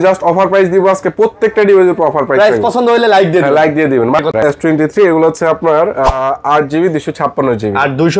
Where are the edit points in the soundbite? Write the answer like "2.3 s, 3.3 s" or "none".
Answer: 4.4 s